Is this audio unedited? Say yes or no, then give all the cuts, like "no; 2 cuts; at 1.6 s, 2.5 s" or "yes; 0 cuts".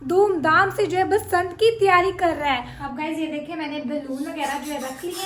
no; 1 cut; at 2.7 s